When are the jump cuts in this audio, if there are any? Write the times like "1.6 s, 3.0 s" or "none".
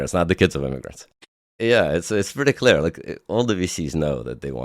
1.2 s